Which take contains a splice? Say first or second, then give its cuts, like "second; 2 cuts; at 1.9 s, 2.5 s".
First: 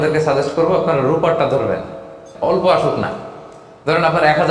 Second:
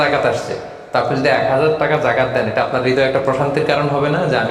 first; 1 cut; at 2.3 s